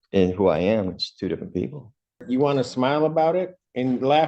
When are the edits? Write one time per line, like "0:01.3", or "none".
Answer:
0:02.2